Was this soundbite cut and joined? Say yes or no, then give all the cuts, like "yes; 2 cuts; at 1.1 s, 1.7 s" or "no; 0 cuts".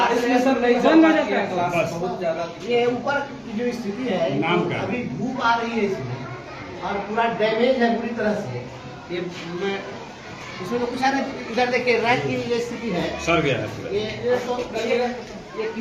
no; 0 cuts